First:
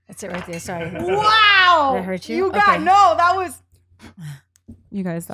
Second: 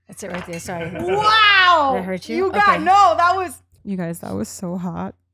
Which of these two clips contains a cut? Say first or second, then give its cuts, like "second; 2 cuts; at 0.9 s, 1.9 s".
second; 1 cut; at 3.7 s